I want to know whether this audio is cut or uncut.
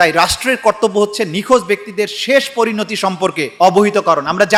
uncut